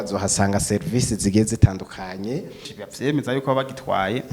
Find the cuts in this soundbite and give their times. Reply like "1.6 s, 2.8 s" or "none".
2.7 s